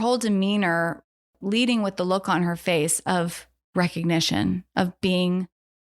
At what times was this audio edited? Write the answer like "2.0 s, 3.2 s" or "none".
1.4 s